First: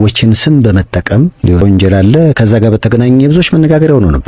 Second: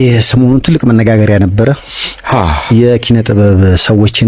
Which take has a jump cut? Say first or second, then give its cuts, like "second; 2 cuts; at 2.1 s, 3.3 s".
first; 1 cut; at 1.6 s